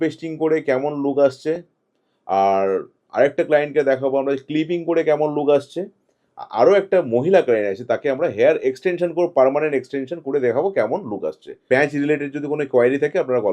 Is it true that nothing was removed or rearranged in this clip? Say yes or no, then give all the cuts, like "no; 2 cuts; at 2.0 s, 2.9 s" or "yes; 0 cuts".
no; 1 cut; at 11.6 s